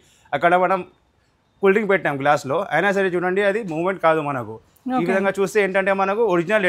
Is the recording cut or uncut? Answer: uncut